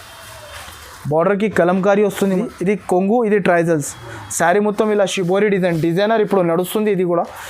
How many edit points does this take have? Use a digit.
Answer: 1